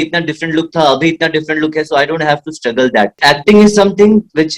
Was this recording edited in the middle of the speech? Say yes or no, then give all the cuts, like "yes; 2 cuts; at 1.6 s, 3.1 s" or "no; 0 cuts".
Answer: yes; 1 cut; at 3.2 s